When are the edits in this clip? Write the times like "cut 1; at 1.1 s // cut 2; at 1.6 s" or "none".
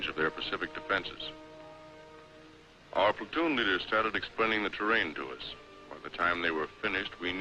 cut 1; at 3.2 s